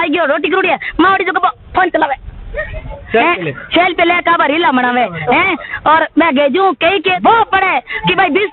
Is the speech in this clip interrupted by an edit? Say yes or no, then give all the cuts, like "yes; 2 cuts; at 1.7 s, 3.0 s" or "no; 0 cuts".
yes; 1 cut; at 7.2 s